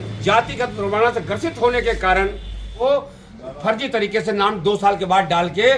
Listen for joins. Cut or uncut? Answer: cut